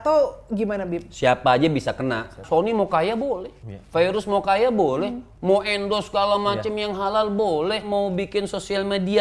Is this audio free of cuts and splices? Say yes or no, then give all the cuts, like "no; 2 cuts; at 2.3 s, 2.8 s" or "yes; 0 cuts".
no; 2 cuts; at 2.4 s, 7.8 s